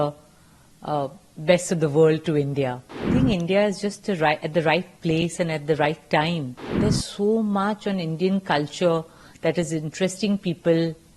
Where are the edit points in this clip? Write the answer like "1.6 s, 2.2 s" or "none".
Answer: 3.1 s, 6.6 s